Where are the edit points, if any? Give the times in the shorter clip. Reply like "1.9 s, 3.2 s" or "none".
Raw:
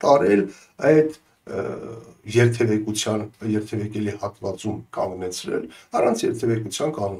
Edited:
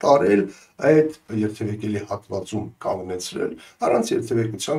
1.2 s